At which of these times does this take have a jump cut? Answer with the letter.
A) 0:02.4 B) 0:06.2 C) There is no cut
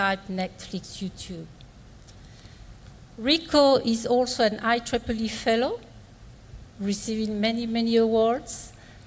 A